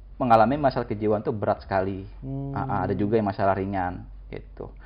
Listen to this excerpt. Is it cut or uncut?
uncut